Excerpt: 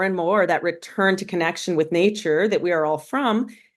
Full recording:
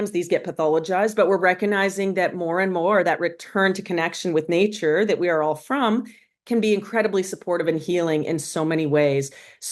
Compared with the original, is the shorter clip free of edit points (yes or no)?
yes